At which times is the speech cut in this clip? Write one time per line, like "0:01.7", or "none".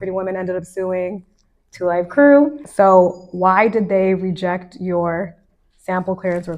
0:02.6